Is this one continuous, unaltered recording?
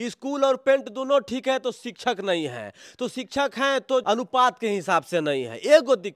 no; 1 cut; at 4.0 s

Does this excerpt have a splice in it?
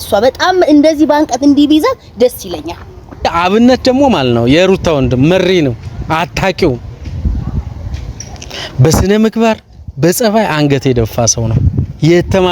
yes; 1 cut; at 3.3 s

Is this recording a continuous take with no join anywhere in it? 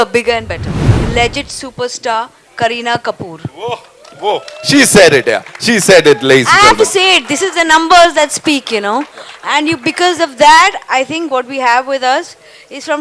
yes; 0 cuts

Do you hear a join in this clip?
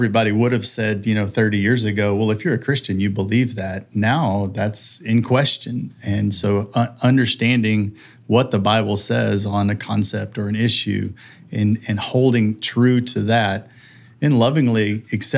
no; 0 cuts

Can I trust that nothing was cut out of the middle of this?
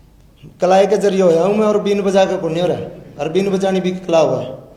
yes; 0 cuts

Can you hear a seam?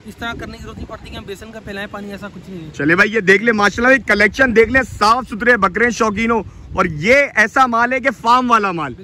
no; 0 cuts

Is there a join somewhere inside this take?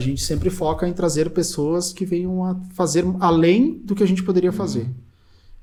no; 0 cuts

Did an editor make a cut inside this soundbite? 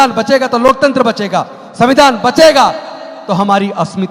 no; 0 cuts

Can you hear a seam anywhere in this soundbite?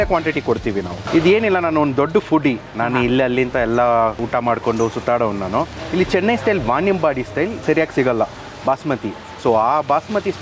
yes; 2 cuts; at 1.0 s, 5.7 s

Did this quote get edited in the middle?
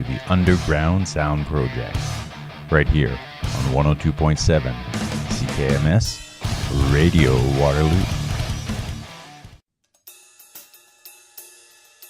yes; 1 cut; at 9.6 s

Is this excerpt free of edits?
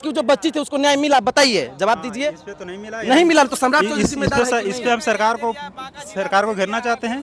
yes; 0 cuts

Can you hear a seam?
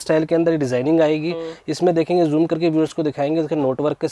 no; 0 cuts

